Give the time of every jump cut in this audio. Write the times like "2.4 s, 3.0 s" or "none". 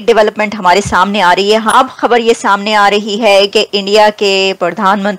1.7 s